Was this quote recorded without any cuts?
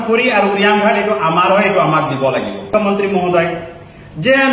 no; 1 cut; at 2.7 s

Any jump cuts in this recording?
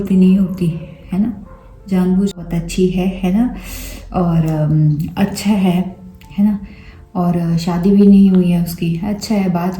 yes; 1 cut; at 2.4 s

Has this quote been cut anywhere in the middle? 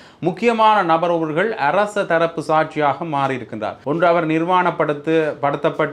yes; 1 cut; at 3.7 s

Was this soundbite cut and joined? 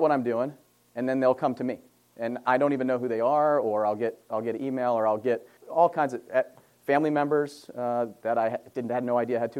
yes; 1 cut; at 5.6 s

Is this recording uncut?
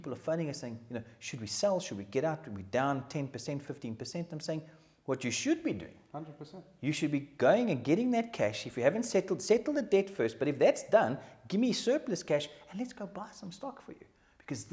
yes; 0 cuts

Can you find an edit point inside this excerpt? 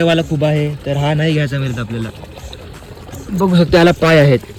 no; 0 cuts

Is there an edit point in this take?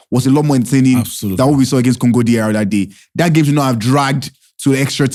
no; 0 cuts

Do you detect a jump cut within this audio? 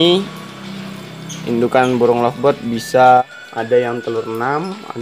yes; 1 cut; at 3.2 s

